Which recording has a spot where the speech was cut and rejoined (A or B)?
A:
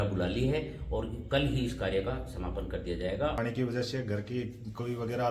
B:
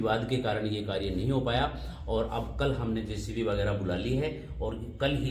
A